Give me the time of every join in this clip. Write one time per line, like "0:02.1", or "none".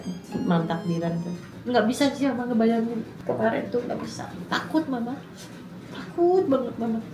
0:01.5